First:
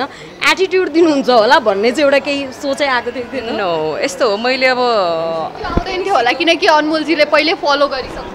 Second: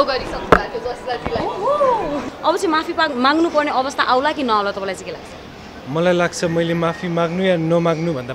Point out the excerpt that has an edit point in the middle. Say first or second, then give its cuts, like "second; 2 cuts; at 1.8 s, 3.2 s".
second; 1 cut; at 2.2 s